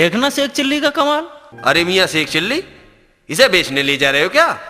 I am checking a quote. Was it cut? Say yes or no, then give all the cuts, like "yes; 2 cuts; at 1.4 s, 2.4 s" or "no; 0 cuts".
yes; 1 cut; at 1.4 s